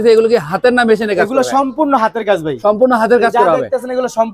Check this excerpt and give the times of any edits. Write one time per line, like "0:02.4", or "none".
none